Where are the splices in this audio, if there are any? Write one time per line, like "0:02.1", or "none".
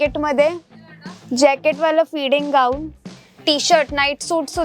0:03.1